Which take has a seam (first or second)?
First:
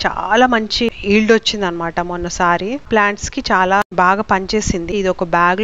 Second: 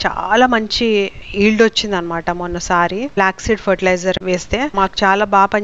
first